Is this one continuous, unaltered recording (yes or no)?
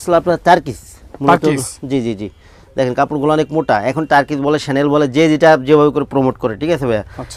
yes